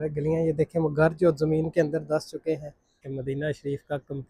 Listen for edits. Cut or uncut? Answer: cut